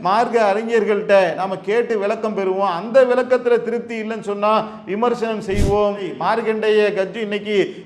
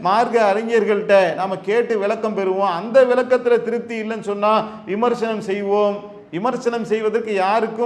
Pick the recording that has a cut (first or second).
first